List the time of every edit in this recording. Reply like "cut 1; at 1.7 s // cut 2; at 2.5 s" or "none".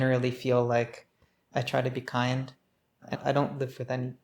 cut 1; at 1.3 s // cut 2; at 3.1 s

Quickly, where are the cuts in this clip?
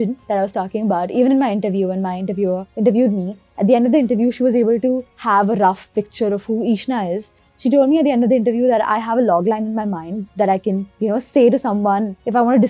none

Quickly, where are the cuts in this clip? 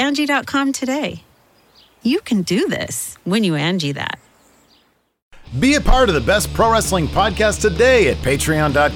cut 1; at 5.2 s

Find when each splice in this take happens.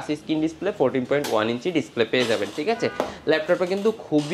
none

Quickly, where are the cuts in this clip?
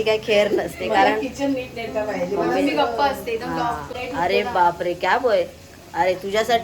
cut 1; at 3.9 s

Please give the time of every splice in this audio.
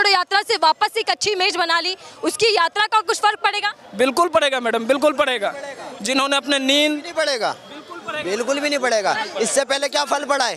none

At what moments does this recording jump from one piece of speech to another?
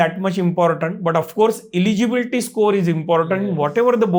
none

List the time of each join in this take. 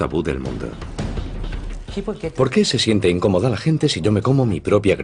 none

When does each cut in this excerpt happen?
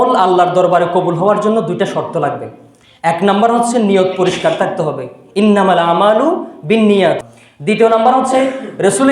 cut 1; at 7.4 s

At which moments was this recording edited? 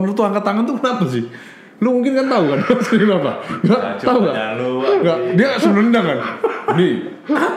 none

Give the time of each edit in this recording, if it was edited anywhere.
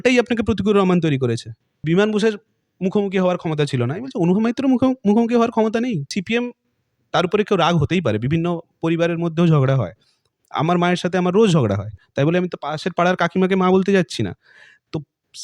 cut 1; at 1.8 s // cut 2; at 6.1 s

